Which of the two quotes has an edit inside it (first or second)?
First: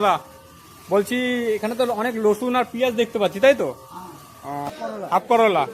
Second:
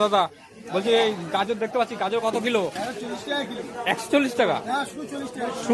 first